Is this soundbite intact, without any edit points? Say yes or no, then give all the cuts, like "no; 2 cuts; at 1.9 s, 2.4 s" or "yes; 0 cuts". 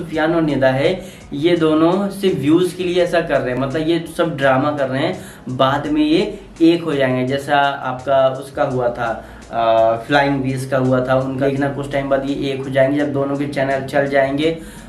yes; 0 cuts